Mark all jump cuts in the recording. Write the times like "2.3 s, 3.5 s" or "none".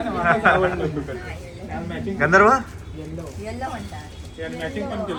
none